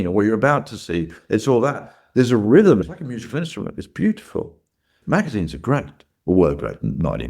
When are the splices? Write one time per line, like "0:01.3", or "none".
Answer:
0:02.8
0:04.9